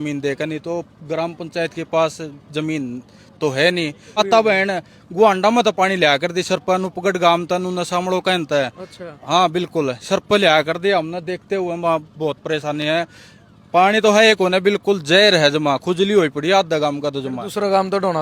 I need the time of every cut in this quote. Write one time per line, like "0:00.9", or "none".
0:04.2